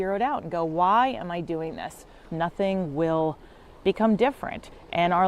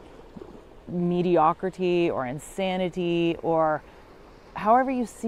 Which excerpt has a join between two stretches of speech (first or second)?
first